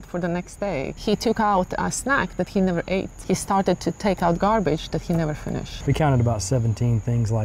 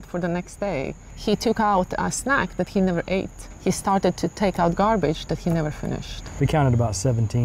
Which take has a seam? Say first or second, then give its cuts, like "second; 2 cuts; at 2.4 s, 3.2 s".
first; 3 cuts; at 0.9 s, 3.1 s, 5.7 s